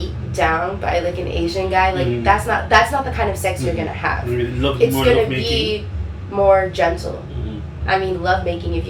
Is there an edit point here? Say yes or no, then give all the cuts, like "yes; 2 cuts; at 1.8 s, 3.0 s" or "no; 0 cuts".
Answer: no; 0 cuts